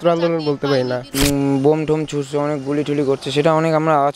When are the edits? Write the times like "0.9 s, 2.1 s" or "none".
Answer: 1.2 s